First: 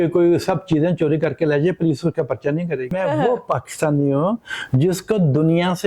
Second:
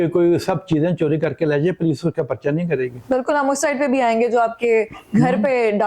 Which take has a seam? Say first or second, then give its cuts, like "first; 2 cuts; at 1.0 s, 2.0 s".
first; 1 cut; at 2.9 s